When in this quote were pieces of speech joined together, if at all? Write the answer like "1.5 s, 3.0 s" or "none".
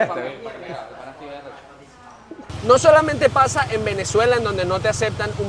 2.4 s